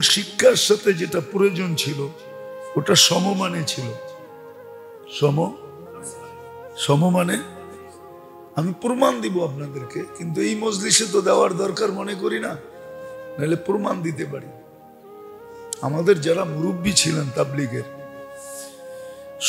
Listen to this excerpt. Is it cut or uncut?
uncut